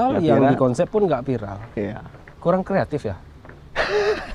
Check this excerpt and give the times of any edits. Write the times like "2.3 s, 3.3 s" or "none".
none